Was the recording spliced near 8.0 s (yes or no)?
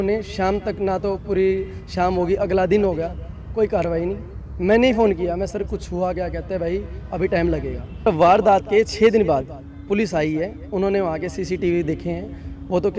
yes